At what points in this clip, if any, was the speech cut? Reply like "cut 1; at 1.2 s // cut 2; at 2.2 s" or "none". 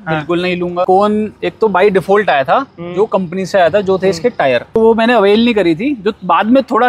cut 1; at 0.8 s // cut 2; at 4.8 s

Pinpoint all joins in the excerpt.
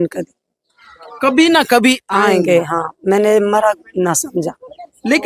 none

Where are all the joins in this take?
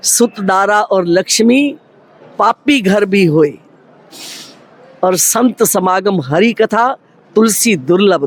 none

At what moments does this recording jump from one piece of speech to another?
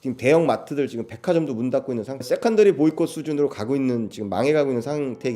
cut 1; at 2.2 s

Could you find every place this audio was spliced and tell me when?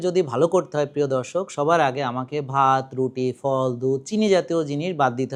none

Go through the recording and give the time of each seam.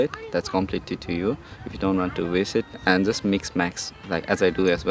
none

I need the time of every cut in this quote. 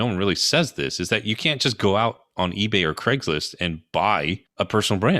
cut 1; at 4.2 s

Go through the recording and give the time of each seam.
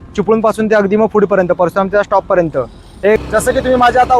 cut 1; at 3.2 s

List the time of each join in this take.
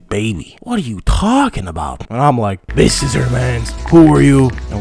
cut 1; at 2.6 s

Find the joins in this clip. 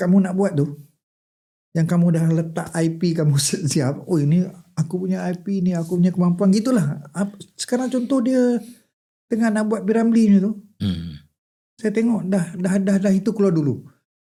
none

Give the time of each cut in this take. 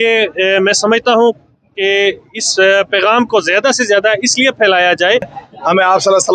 cut 1; at 5.4 s

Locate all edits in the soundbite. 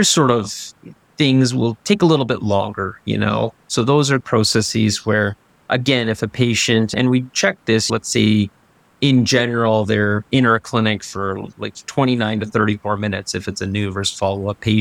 cut 1; at 4.2 s

